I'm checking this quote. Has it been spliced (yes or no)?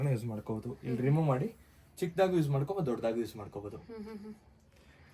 no